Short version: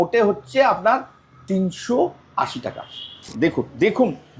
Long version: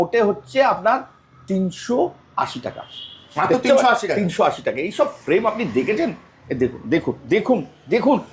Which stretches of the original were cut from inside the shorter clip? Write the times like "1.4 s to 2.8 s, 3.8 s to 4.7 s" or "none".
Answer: 3.3 s to 6.8 s